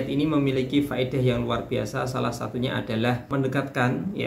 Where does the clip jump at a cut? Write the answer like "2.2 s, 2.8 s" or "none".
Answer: 3.2 s